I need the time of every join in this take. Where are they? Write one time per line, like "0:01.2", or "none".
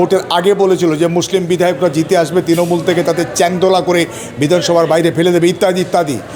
none